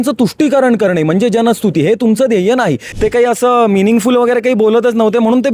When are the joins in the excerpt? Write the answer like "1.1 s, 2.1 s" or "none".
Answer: 2.8 s